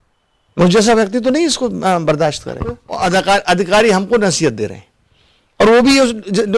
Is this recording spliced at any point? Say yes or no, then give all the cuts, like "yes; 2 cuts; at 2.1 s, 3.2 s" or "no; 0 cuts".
yes; 1 cut; at 2.9 s